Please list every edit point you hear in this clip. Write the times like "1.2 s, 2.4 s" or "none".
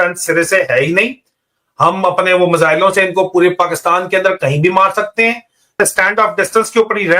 5.7 s